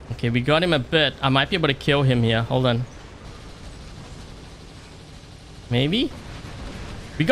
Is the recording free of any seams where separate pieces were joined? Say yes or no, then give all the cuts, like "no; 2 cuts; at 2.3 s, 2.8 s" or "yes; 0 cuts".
yes; 0 cuts